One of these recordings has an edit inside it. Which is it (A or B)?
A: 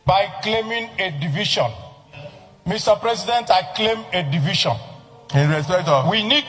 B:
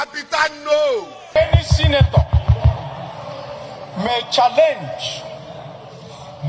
B